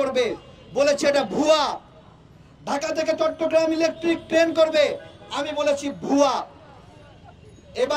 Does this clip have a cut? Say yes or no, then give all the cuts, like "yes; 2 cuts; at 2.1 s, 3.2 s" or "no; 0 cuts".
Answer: no; 0 cuts